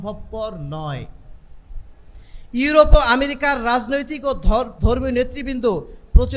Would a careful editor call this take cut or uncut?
uncut